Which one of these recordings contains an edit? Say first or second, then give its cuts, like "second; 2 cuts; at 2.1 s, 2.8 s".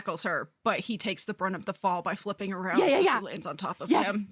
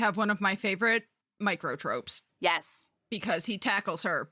second; 2 cuts; at 1.2 s, 2.2 s